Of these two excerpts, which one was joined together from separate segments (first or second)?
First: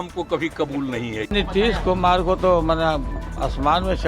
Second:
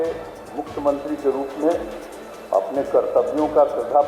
first